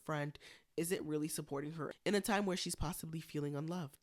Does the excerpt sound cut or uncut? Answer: uncut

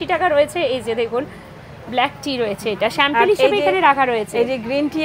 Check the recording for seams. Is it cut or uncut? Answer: uncut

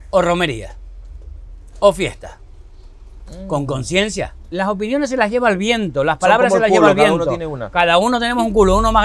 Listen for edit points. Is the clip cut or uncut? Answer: cut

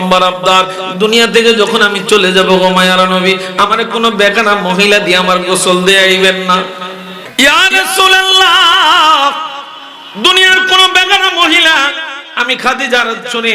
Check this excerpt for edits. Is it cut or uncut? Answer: cut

